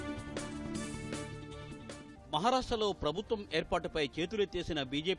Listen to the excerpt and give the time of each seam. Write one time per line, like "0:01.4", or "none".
0:01.2